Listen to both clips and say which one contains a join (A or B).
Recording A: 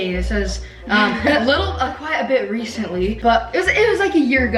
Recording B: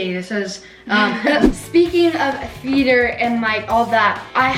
B